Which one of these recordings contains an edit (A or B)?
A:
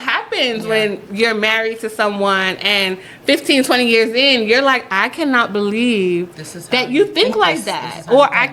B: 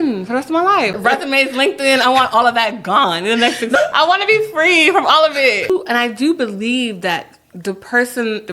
B